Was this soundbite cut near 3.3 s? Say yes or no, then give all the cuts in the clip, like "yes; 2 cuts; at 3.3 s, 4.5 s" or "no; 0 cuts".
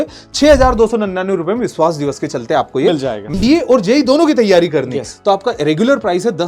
yes; 1 cut; at 3.3 s